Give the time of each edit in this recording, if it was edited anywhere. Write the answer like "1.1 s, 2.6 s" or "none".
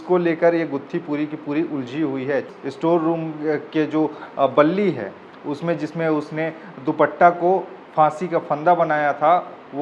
2.5 s